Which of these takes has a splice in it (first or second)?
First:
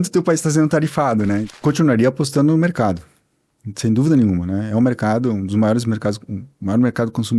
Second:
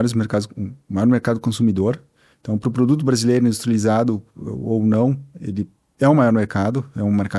first